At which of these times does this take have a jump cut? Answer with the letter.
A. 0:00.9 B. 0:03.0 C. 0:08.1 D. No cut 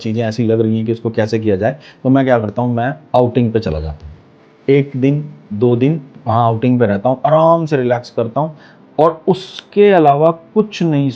B